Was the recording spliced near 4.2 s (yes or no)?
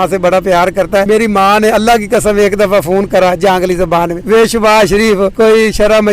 yes